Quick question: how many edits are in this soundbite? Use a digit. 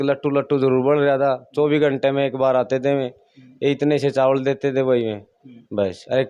0